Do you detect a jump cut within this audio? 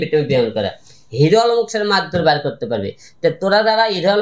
no; 0 cuts

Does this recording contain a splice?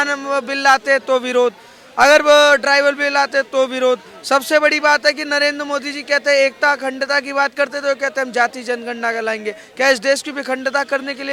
no; 0 cuts

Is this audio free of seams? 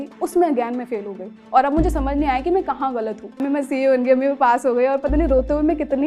no; 1 cut; at 3.4 s

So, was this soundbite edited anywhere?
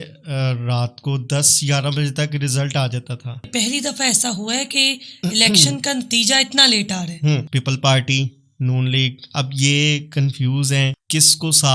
yes; 2 cuts; at 3.5 s, 7.5 s

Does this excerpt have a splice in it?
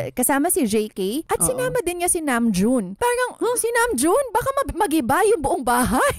yes; 2 cuts; at 1.2 s, 2.9 s

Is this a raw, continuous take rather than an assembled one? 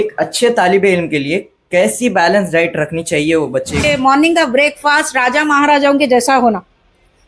no; 1 cut; at 3.8 s

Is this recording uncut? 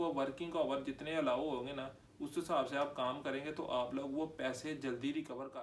yes; 0 cuts

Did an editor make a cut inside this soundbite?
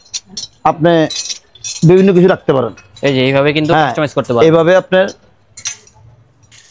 no; 0 cuts

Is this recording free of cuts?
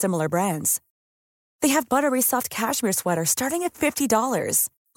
yes; 0 cuts

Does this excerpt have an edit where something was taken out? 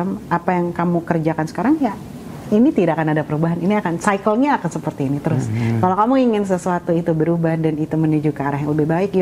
no; 0 cuts

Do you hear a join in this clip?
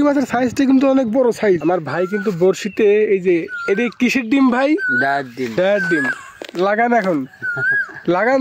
yes; 2 cuts; at 1.6 s, 5.5 s

